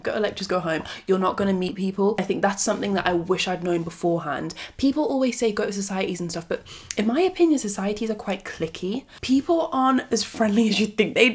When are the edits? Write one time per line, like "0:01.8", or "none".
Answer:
0:01.7
0:09.1